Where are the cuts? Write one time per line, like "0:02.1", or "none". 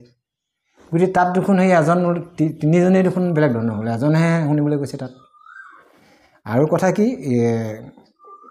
none